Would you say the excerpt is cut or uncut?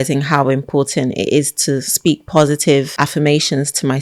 cut